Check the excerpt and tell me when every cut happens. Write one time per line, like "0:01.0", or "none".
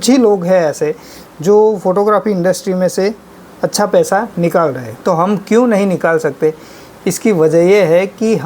none